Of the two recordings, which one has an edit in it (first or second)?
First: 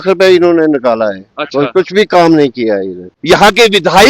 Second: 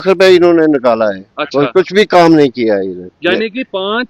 first